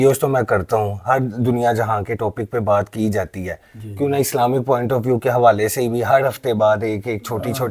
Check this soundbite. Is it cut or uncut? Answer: uncut